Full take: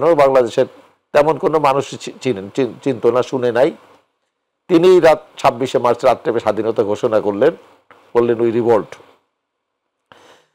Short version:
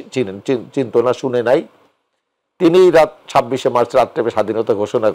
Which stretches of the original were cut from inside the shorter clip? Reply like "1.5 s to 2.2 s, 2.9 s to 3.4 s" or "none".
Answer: none